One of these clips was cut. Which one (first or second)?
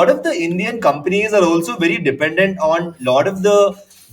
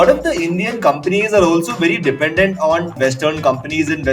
second